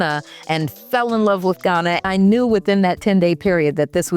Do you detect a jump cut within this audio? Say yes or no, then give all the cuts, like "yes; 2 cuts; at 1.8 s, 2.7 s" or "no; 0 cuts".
yes; 1 cut; at 2.0 s